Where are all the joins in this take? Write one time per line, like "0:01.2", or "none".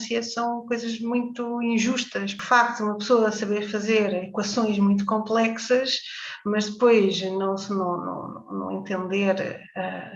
0:02.4